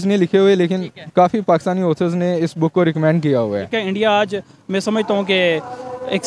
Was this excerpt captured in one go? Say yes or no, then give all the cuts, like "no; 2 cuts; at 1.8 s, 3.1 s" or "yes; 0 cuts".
no; 1 cut; at 3.7 s